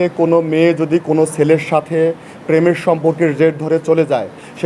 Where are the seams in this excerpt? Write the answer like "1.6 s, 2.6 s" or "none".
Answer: none

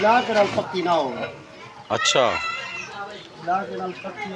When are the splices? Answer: none

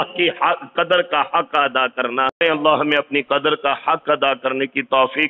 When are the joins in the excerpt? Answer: 2.4 s

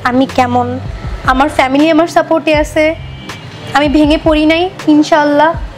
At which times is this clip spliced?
none

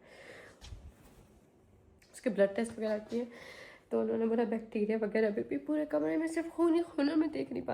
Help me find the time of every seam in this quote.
2.0 s

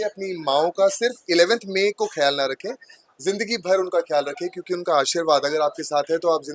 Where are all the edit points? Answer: none

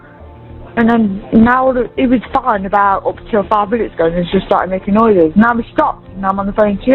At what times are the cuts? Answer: none

